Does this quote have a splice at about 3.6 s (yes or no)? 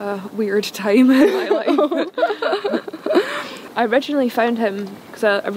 yes